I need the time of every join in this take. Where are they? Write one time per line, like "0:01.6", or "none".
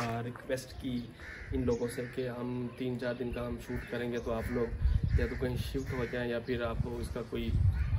none